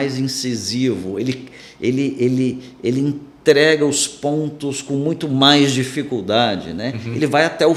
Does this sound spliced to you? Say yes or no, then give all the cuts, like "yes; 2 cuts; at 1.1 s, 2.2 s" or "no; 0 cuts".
no; 0 cuts